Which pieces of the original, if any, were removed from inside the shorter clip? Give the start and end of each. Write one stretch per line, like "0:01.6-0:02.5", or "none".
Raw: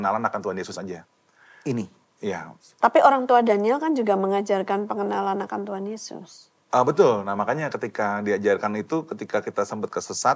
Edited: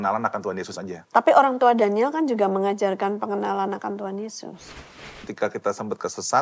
0:00.9-0:02.6
0:06.7-0:09.0